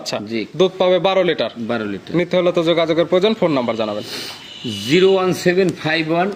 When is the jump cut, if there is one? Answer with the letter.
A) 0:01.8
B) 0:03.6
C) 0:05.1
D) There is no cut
D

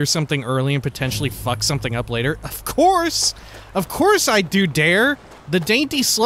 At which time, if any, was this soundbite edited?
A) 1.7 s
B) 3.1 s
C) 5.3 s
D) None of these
C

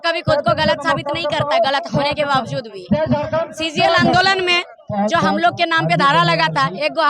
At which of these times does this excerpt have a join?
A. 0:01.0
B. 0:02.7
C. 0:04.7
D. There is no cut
D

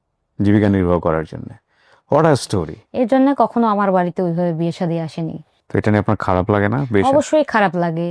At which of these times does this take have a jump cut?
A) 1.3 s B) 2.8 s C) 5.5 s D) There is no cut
B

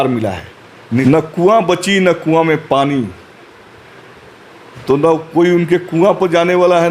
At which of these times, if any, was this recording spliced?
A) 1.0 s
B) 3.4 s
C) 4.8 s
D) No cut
A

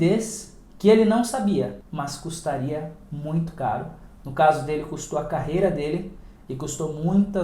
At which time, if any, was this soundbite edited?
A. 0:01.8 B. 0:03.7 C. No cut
A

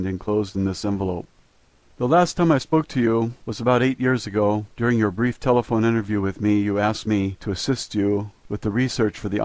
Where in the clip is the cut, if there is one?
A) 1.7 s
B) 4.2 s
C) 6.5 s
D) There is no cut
C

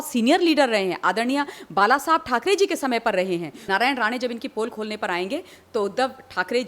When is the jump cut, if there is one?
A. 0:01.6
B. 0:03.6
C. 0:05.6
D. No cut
B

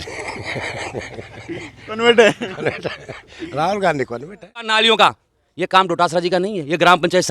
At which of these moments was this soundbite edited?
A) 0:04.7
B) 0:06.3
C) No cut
A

